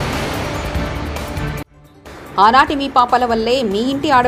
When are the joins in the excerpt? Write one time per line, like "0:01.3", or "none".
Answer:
none